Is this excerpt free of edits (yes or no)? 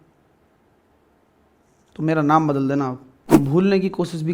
no